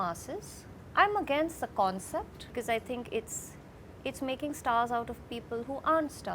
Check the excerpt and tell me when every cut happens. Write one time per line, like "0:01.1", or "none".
0:00.8
0:02.5

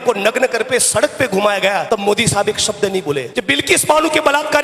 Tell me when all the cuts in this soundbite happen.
0:01.8
0:03.3

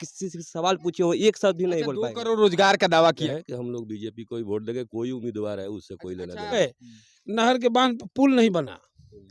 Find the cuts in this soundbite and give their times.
0:03.2
0:06.5

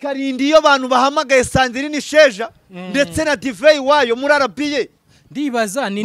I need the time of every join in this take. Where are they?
none

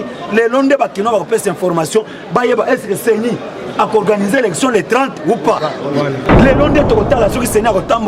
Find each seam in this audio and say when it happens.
0:06.3

